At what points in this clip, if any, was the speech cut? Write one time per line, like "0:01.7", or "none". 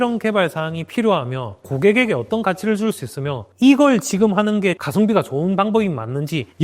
0:01.7
0:03.5
0:04.8